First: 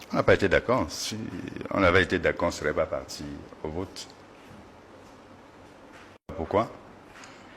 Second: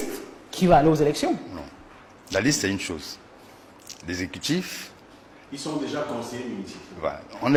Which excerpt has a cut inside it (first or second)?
first